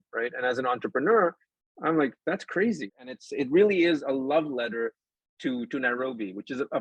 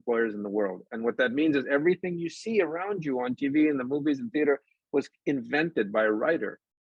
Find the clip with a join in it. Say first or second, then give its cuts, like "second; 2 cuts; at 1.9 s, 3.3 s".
first; 1 cut; at 2.9 s